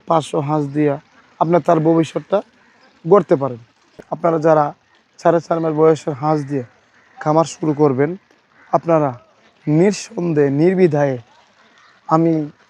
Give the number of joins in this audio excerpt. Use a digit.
1